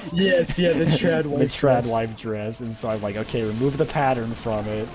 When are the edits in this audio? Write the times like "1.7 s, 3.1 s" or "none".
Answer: none